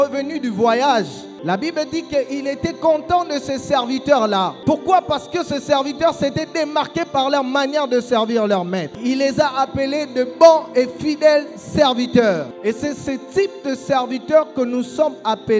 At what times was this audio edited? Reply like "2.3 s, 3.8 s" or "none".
1.4 s, 4.6 s, 8.9 s, 12.5 s

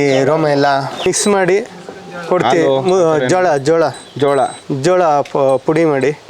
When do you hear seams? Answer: 1.1 s

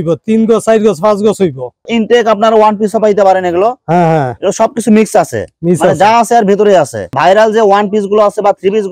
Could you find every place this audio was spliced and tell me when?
1.9 s, 7.1 s

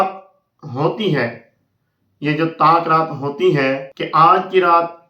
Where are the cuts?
3.9 s

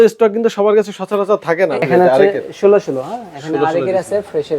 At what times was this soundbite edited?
1.8 s

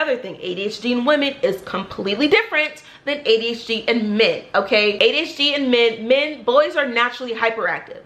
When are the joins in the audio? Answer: none

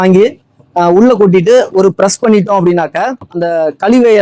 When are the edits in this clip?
3.3 s

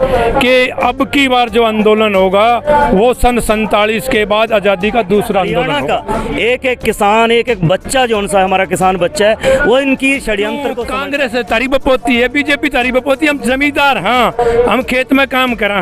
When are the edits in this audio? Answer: 5.7 s, 10.8 s

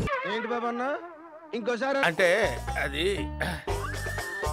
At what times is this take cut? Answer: none

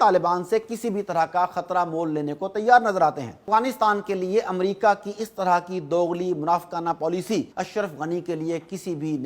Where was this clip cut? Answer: 3.4 s, 7.5 s

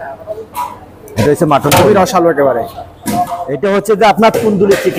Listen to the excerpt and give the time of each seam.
3.4 s

